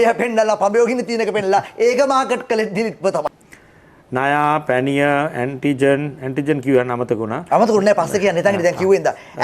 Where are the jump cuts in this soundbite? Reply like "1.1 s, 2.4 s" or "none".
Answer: 3.3 s